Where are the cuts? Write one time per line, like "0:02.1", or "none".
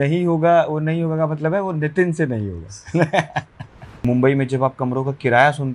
0:04.0